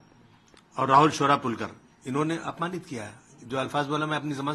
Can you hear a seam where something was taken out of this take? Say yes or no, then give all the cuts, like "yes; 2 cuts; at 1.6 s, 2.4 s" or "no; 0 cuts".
no; 0 cuts